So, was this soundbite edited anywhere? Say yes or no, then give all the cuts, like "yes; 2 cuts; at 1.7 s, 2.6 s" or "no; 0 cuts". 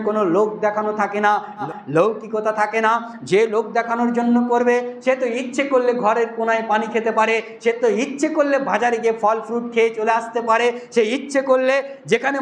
no; 0 cuts